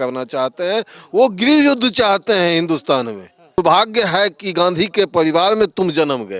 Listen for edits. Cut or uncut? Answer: cut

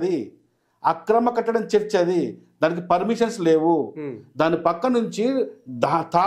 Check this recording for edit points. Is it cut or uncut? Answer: uncut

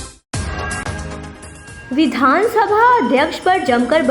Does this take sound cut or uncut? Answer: cut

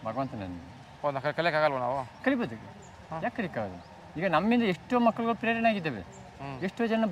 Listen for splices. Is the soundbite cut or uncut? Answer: uncut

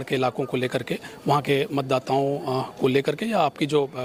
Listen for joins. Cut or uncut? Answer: uncut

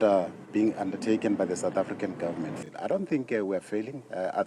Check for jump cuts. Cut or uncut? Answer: cut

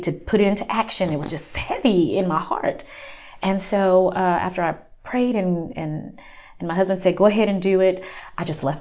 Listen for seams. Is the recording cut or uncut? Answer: uncut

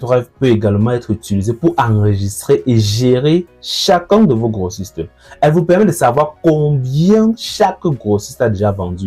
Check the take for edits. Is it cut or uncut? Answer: uncut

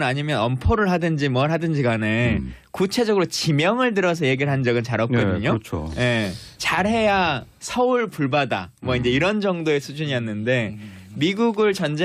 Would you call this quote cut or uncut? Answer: uncut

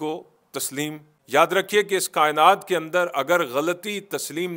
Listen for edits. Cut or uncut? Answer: cut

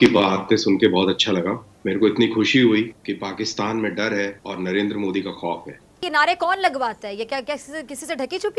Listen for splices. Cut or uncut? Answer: cut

